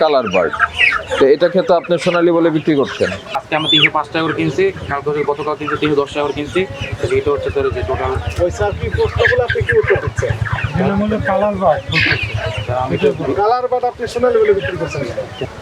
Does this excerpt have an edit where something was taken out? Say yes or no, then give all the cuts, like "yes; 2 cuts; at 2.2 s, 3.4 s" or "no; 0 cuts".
yes; 1 cut; at 3.4 s